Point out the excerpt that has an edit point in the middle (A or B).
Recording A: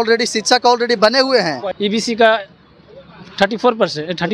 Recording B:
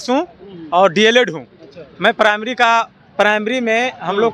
A